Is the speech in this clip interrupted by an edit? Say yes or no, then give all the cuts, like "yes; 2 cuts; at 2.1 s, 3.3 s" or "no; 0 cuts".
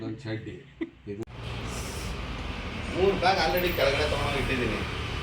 yes; 1 cut; at 1.2 s